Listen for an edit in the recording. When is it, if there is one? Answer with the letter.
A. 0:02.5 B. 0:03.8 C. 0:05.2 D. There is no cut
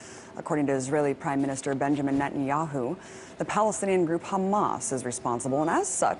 A